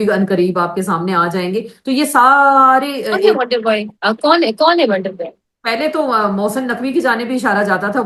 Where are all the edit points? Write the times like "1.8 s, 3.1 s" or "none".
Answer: none

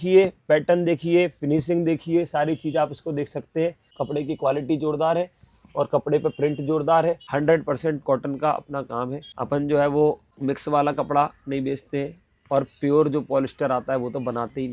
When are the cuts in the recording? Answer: 3.8 s, 7.2 s, 9.3 s, 10.3 s

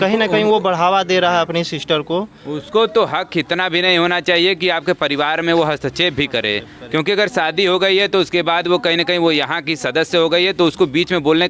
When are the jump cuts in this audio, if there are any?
none

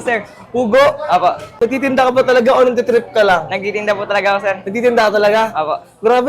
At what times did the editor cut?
none

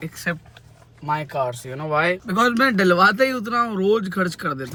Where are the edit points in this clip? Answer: none

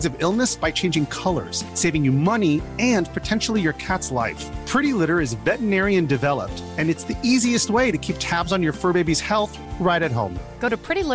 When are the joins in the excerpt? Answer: none

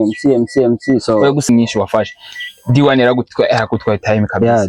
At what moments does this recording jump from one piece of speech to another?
1.5 s

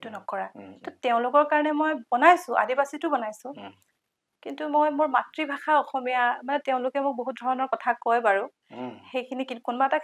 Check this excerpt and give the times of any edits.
none

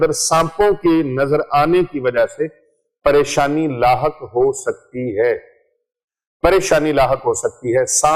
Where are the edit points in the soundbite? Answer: none

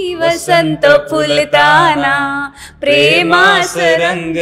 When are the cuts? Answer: none

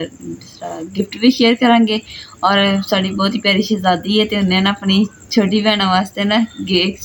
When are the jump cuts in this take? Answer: none

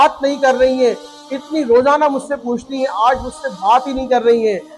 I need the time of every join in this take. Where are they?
none

